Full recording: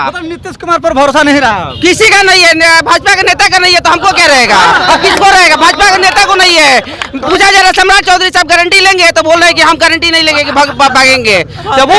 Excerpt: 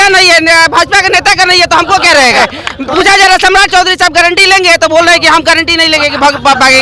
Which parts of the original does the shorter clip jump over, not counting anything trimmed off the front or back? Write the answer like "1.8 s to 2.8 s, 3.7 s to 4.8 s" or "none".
4.5 s to 6.7 s